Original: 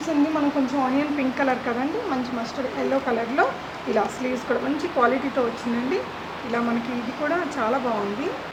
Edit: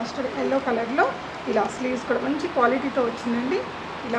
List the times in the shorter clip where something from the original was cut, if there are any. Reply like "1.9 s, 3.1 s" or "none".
none